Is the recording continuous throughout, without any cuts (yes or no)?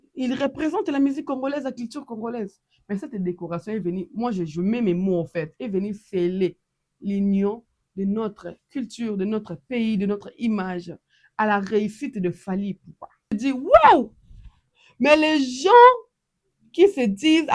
no